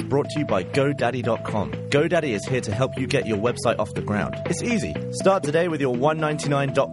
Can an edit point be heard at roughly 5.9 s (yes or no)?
no